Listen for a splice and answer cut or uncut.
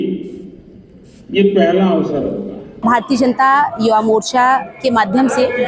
cut